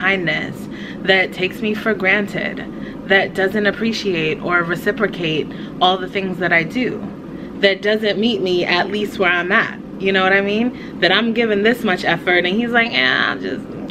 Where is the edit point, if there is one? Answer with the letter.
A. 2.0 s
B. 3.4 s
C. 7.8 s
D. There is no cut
D